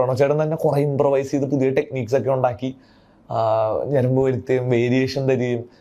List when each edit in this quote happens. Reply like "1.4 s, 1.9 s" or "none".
none